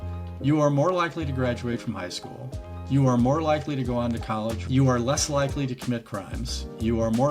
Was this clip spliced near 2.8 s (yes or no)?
no